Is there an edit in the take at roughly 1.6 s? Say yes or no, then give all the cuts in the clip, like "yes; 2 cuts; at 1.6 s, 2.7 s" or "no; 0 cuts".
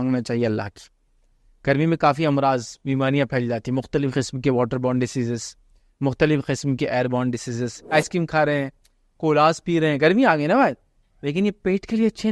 no; 1 cut; at 7.9 s